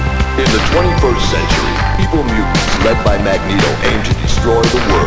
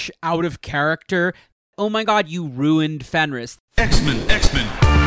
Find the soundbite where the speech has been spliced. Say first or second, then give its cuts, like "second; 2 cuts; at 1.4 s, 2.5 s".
second; 1 cut; at 3.5 s